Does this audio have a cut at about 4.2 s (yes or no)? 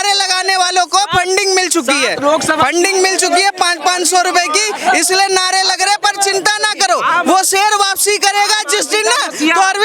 no